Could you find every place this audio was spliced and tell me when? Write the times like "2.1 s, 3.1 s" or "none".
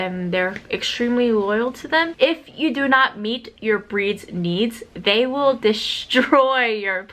2.1 s